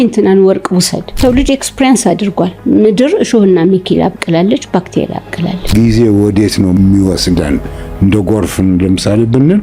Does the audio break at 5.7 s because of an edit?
yes; 2 cuts; at 1.2 s, 5.7 s

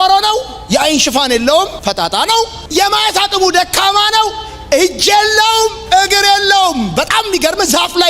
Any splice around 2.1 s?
yes; 1 cut; at 2.1 s

